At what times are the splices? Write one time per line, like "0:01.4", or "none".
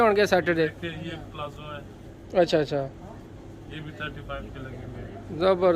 none